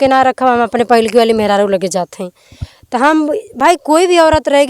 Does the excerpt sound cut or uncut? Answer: uncut